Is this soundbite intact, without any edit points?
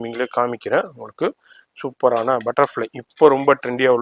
yes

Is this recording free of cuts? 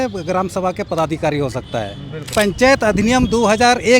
no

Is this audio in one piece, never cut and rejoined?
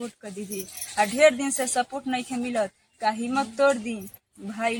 yes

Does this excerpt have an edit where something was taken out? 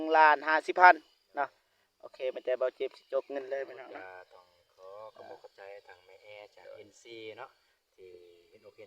yes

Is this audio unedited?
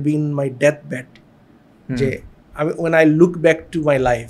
yes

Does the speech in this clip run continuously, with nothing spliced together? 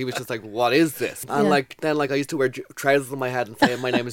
no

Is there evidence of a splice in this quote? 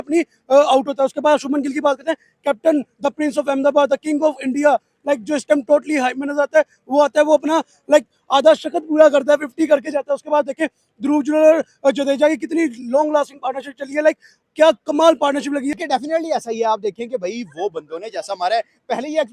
yes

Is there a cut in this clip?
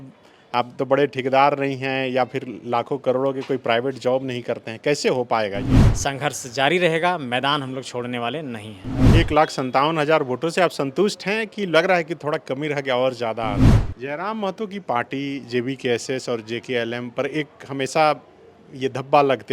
yes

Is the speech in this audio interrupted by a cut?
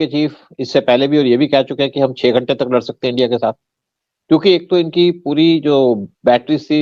no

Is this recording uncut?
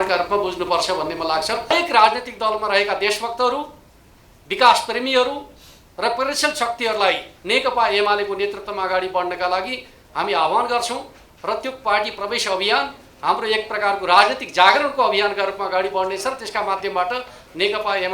no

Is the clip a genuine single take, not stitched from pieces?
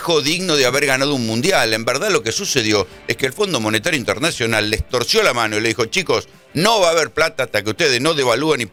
yes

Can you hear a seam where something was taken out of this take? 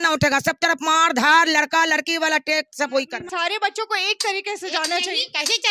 yes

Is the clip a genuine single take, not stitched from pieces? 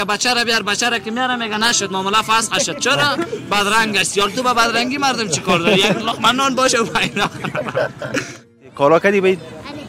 no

